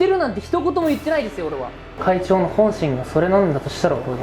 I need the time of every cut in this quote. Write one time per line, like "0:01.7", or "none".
0:02.0